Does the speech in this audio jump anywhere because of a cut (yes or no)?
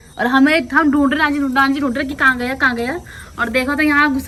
no